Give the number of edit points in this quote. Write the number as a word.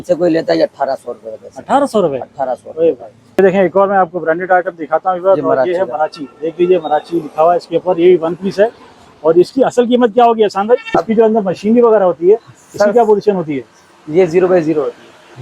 two